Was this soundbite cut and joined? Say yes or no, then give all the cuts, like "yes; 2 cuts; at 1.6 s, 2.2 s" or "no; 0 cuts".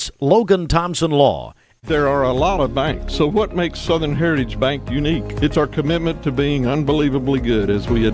yes; 1 cut; at 1.8 s